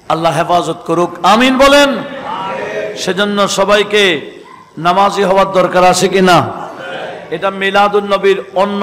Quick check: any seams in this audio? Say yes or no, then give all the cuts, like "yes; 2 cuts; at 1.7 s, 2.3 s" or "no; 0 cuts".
no; 0 cuts